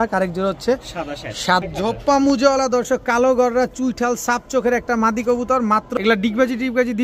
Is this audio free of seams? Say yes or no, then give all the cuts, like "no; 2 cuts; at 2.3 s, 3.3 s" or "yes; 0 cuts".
no; 2 cuts; at 1.6 s, 5.9 s